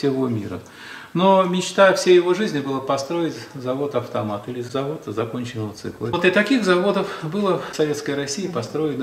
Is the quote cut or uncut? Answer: cut